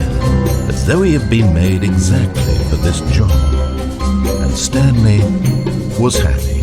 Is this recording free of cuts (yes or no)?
yes